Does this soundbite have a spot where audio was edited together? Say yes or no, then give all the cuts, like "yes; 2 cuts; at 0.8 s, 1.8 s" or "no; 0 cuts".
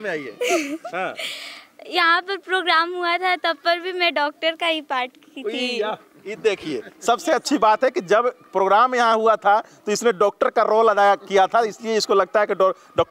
no; 0 cuts